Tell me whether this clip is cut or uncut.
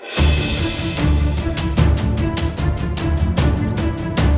cut